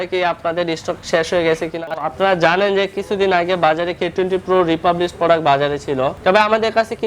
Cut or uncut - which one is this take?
cut